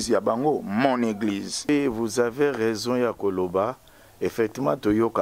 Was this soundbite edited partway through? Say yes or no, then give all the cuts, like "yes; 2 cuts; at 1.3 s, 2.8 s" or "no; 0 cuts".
yes; 1 cut; at 1.7 s